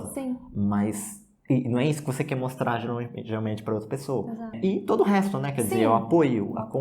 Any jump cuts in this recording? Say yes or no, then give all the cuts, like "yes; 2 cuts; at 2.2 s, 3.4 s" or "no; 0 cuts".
yes; 1 cut; at 4.6 s